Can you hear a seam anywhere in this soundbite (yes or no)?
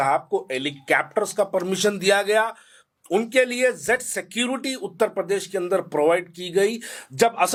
no